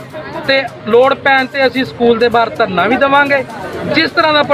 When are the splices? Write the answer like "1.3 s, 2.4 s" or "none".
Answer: none